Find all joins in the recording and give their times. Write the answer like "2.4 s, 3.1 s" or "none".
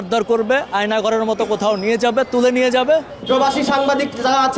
3.1 s